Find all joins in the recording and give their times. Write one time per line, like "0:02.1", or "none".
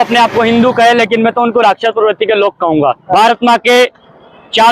0:03.0